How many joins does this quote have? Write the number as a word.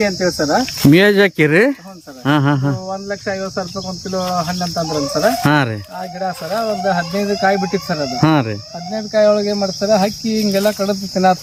zero